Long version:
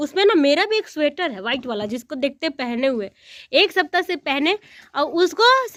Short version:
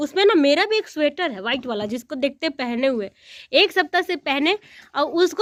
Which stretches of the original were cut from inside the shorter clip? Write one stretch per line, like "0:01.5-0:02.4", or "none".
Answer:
none

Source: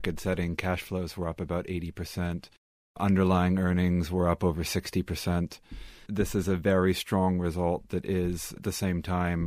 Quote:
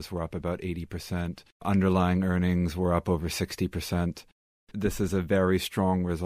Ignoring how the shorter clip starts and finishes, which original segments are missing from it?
0:02.5-0:02.8

